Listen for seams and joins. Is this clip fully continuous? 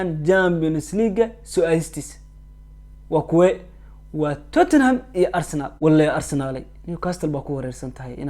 no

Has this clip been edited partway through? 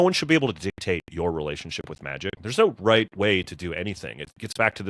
yes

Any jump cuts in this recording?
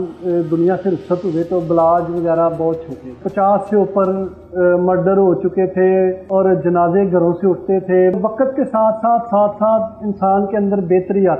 yes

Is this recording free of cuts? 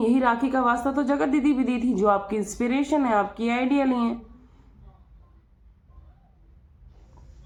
yes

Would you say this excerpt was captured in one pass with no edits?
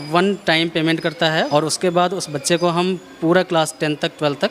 no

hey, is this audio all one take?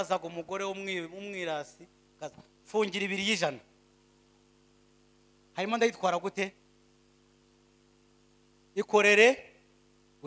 yes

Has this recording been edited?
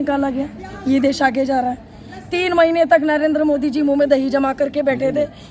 no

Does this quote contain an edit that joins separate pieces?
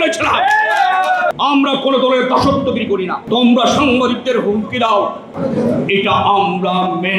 yes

